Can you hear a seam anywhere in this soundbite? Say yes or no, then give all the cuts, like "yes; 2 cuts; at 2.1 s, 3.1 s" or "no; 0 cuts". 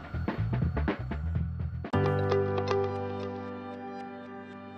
no; 0 cuts